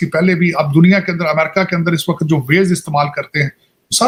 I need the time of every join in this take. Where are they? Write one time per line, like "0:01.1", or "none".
none